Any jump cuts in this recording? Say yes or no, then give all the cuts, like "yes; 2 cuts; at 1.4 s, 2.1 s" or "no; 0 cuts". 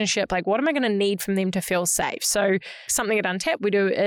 yes; 1 cut; at 2.9 s